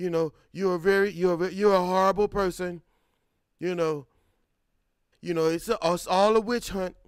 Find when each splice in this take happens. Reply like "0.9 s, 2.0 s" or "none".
5.1 s